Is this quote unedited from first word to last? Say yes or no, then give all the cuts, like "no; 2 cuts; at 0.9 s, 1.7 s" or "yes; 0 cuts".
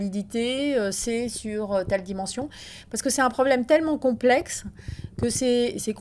yes; 0 cuts